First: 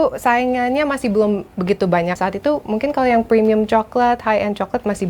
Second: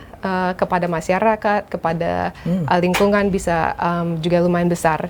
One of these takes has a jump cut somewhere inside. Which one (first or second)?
first